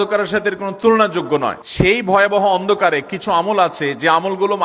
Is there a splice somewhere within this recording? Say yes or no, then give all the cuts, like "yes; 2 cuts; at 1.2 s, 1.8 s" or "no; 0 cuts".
yes; 1 cut; at 1.6 s